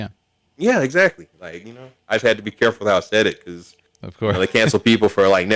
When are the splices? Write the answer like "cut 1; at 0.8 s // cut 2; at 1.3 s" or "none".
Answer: none